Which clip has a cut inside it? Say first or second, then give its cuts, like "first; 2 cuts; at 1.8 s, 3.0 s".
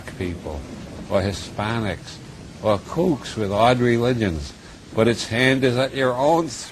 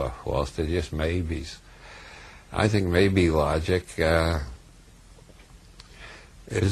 first; 1 cut; at 3.5 s